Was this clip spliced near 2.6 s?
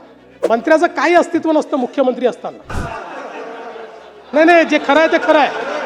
yes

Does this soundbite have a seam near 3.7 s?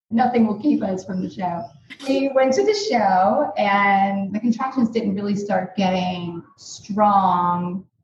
no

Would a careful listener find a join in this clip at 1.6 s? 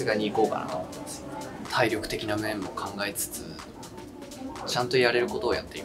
yes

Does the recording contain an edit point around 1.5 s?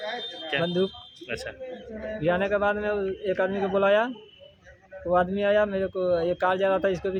no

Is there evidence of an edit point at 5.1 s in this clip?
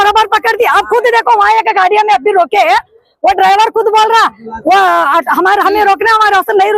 no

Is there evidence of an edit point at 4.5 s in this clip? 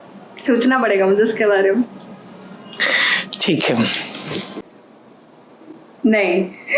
yes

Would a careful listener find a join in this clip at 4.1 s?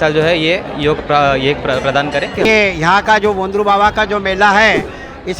no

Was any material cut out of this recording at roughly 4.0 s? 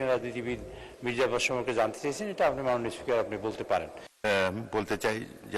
yes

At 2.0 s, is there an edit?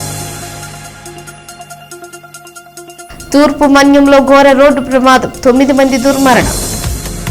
yes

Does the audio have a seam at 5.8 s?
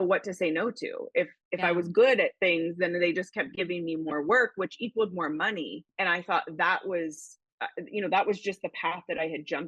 yes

